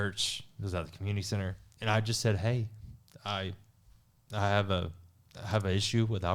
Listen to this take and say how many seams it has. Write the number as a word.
one